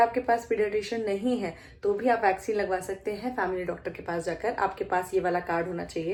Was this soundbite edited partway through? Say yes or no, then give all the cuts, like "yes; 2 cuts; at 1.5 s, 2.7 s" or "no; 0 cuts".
no; 0 cuts